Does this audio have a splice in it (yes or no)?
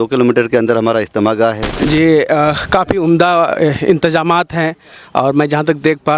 yes